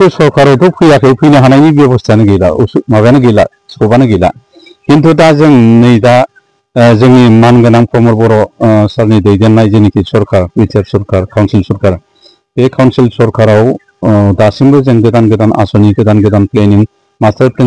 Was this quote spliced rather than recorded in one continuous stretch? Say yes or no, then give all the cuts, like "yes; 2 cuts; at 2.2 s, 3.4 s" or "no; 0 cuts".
no; 0 cuts